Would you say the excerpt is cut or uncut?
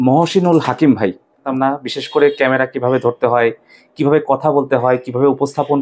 cut